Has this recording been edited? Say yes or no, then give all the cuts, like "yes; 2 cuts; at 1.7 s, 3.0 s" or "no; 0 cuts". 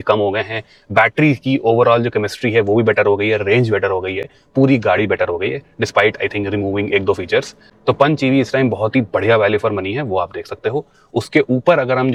no; 0 cuts